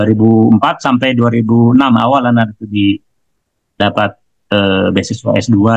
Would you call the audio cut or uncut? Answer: uncut